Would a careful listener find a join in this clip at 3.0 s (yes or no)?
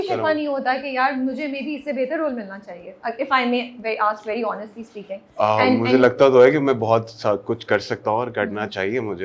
no